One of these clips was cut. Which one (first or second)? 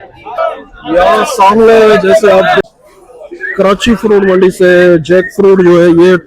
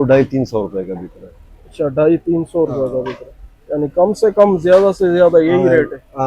first